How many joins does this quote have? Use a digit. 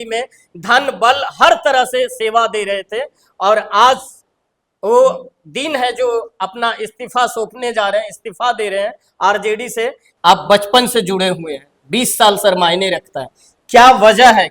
1